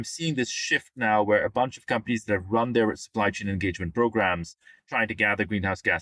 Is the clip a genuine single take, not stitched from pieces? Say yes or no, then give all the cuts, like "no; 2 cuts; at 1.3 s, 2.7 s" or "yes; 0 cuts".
yes; 0 cuts